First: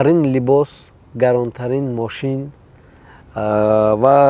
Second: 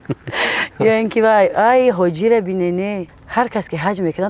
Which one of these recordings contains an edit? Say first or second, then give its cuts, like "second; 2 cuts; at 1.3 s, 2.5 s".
second; 1 cut; at 3.1 s